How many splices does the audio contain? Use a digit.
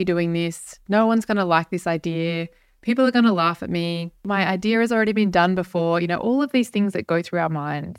1